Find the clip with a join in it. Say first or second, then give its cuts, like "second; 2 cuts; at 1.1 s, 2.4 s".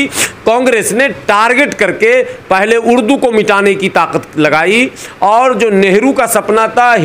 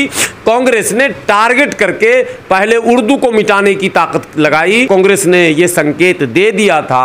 second; 1 cut; at 4.9 s